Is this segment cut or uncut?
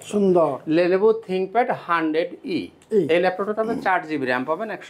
uncut